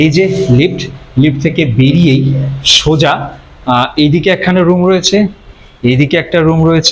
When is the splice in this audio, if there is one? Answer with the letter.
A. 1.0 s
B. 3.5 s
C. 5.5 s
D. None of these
D